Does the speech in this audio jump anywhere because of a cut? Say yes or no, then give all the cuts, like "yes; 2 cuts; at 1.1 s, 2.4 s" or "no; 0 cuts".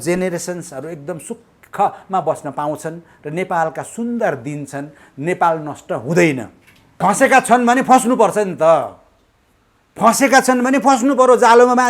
yes; 1 cut; at 6.9 s